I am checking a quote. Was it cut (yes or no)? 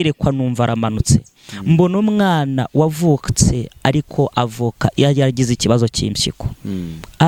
no